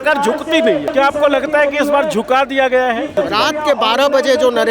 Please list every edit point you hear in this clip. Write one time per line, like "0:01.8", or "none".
0:00.9
0:03.1